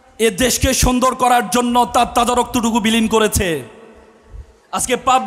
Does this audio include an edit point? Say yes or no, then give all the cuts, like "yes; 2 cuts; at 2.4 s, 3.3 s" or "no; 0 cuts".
no; 0 cuts